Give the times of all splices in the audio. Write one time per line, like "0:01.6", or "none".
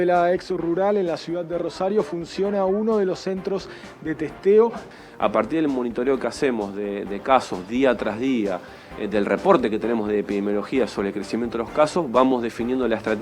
0:04.9

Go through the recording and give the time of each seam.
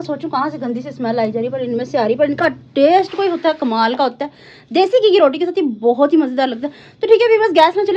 none

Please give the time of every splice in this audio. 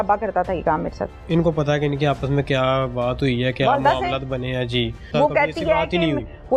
0:01.2
0:05.1

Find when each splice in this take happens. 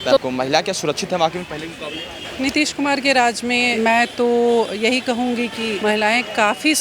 0:02.3
0:03.7
0:05.7

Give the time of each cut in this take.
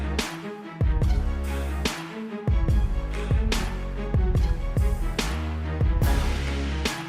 none

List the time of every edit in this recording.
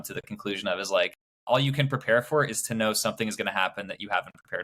0:01.3

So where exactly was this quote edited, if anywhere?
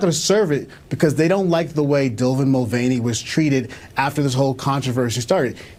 none

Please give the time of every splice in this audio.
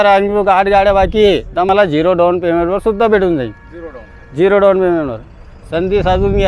0:01.7

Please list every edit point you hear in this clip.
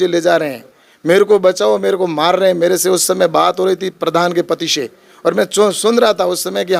none

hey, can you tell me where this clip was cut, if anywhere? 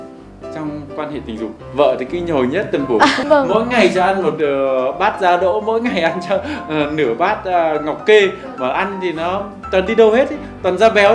0:01.6
0:03.2

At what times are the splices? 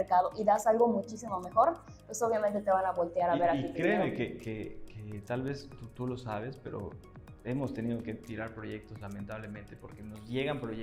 none

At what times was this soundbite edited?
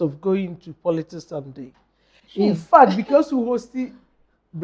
none

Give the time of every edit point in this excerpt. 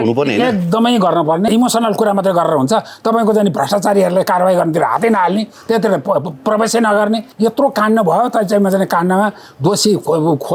0:01.5
0:07.3

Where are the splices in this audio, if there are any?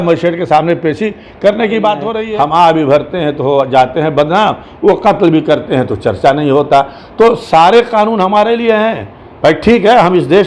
0:02.2

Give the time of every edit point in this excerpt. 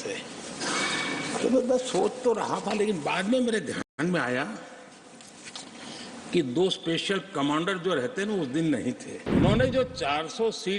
0:09.1

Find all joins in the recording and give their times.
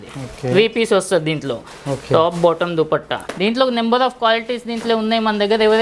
0:03.2

